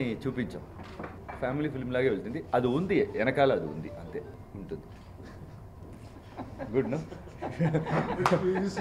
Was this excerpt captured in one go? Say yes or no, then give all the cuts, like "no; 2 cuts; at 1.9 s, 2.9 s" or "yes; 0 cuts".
no; 2 cuts; at 1.2 s, 4.4 s